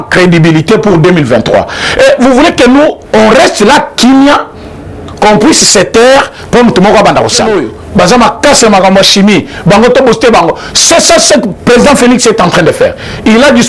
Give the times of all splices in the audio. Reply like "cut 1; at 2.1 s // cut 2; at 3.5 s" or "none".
cut 1; at 7.5 s